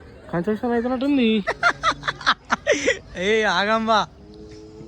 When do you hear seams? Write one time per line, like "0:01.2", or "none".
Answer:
0:01.4